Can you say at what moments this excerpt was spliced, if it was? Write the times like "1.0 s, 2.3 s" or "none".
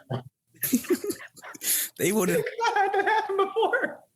none